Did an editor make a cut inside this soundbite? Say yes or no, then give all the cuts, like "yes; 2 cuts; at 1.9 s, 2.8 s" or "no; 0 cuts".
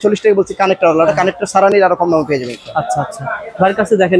no; 0 cuts